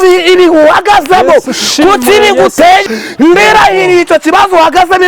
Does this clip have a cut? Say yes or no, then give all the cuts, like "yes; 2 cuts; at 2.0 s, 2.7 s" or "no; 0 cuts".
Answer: yes; 1 cut; at 2.8 s